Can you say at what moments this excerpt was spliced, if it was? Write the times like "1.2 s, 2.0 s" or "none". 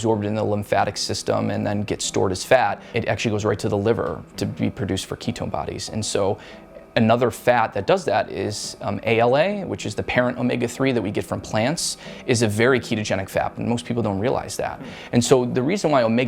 2.9 s